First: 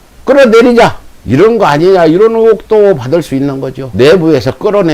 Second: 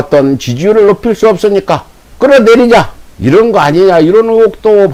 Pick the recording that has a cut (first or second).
first